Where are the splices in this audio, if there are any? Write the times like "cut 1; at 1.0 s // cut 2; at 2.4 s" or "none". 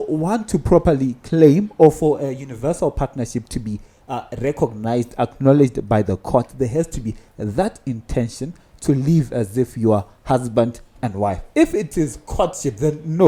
none